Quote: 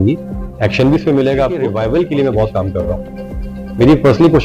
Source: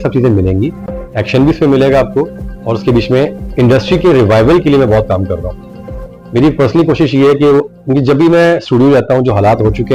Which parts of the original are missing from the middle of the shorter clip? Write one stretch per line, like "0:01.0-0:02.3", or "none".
0:02.2-0:04.2